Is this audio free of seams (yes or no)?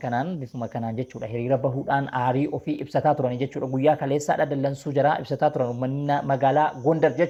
yes